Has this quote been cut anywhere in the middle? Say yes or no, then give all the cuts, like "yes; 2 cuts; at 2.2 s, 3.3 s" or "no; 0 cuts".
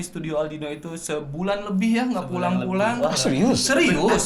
no; 0 cuts